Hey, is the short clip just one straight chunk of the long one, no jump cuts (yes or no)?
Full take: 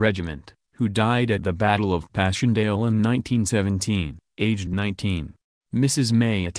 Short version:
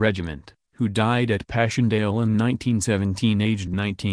no